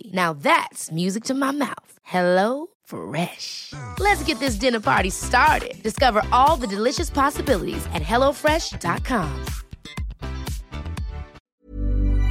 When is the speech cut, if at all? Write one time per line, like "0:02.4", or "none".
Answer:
0:11.4